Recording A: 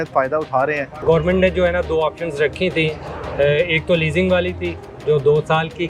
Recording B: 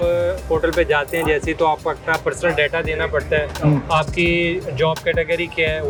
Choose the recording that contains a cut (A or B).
A